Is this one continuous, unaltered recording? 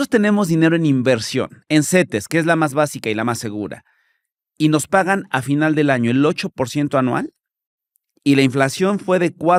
yes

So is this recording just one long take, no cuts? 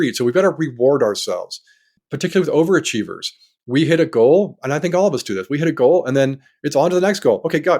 no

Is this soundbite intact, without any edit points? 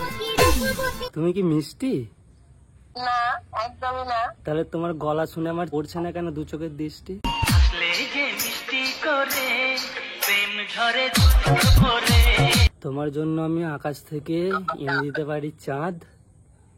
no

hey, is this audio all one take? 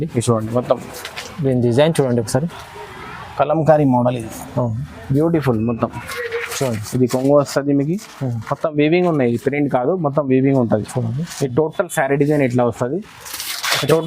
no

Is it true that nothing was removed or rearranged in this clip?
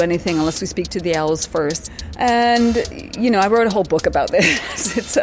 no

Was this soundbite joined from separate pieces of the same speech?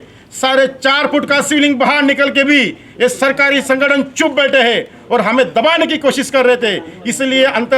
no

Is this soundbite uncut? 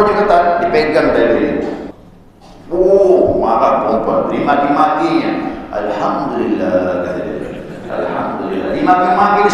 no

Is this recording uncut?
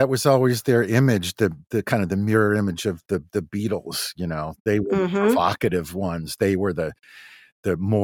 yes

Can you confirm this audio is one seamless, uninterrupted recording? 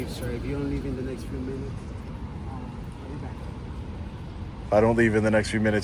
yes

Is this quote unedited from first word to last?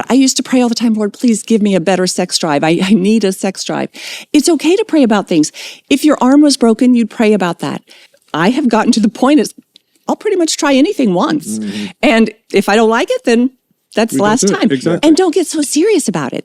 no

